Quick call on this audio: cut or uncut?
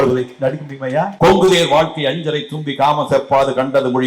cut